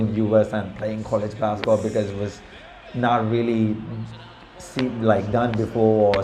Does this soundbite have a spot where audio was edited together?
no; 0 cuts

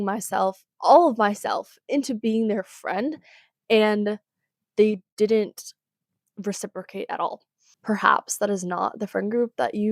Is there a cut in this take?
yes; 1 cut; at 7.7 s

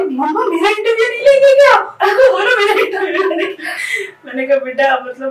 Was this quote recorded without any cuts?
yes; 0 cuts

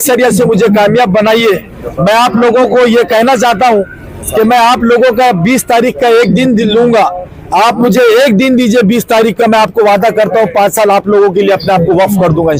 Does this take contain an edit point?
no; 0 cuts

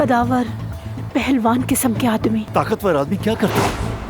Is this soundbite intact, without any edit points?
no; 1 cut; at 2.5 s

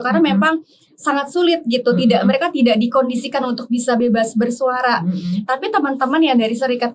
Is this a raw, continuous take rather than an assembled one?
yes; 0 cuts

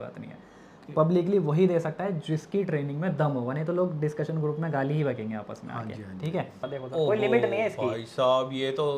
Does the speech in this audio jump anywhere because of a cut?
yes; 1 cut; at 6.7 s

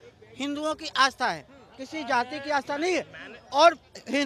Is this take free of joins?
yes; 0 cuts

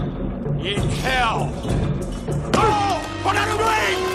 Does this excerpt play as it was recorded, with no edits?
yes; 0 cuts

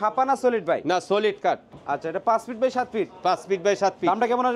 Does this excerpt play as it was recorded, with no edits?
no; 1 cut; at 1.8 s

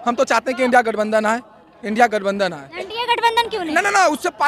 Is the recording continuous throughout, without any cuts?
yes; 0 cuts

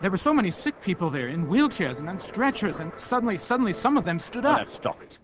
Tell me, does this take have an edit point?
yes; 1 cut; at 1.6 s

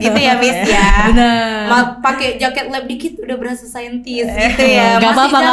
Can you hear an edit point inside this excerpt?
no; 0 cuts

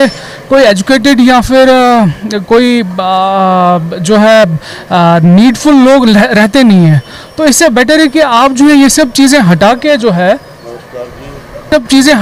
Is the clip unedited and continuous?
yes; 0 cuts

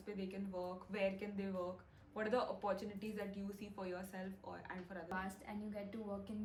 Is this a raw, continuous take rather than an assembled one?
yes; 0 cuts

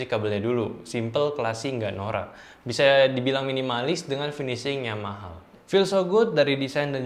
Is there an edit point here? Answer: yes; 1 cut; at 5.4 s

